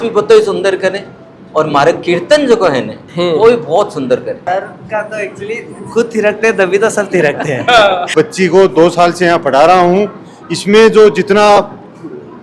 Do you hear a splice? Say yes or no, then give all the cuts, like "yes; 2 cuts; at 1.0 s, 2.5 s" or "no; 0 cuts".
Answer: yes; 2 cuts; at 4.3 s, 8.1 s